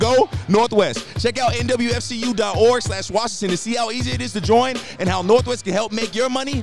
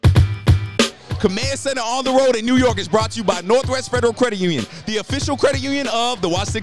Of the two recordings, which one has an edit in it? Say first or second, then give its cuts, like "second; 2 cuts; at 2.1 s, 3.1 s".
second; 1 cut; at 1.0 s